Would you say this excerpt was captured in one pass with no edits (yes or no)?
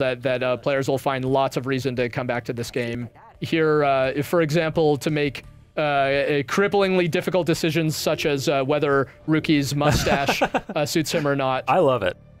no